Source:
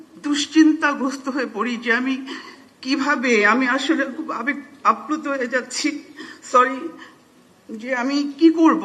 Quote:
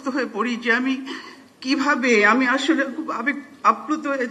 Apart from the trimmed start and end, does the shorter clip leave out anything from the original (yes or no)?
no